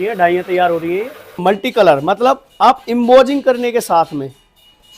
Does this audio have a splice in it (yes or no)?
yes